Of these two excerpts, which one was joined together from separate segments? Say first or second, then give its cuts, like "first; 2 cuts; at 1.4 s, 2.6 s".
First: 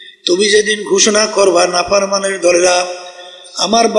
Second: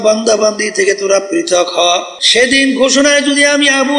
second; 1 cut; at 2.2 s